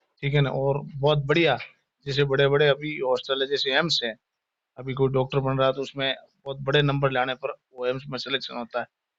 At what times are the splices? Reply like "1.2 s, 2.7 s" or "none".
none